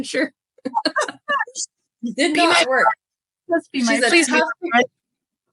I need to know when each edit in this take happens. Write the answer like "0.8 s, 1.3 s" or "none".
none